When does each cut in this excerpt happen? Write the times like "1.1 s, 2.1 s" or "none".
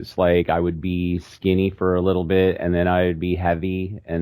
none